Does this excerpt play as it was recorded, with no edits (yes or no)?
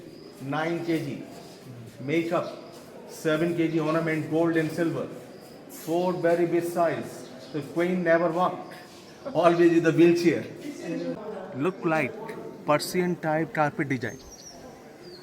no